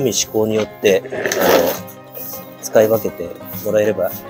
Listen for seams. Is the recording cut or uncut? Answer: uncut